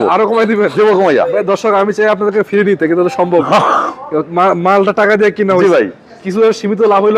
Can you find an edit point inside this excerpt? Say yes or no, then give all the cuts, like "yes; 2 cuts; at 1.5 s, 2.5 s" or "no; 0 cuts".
no; 0 cuts